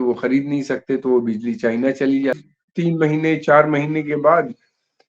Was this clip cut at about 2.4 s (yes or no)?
yes